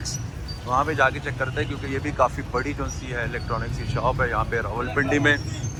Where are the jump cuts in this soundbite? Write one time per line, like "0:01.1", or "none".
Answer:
none